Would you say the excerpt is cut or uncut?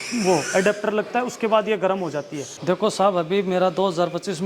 cut